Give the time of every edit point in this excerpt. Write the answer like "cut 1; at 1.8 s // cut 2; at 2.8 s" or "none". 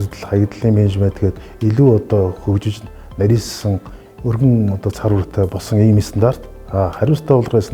none

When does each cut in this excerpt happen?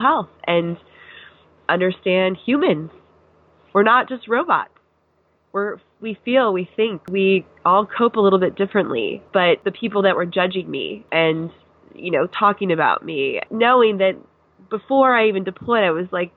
cut 1; at 7.1 s // cut 2; at 9.5 s // cut 3; at 11.0 s // cut 4; at 13.4 s

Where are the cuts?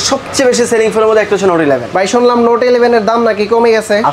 none

